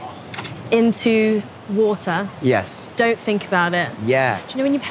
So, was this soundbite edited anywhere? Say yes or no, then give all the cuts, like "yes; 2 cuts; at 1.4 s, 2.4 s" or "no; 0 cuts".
no; 0 cuts